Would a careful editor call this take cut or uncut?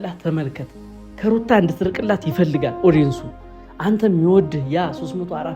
uncut